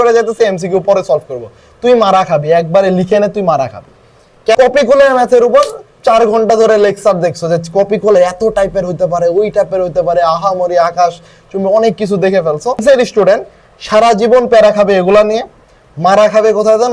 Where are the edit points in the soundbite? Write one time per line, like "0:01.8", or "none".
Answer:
0:04.6
0:12.8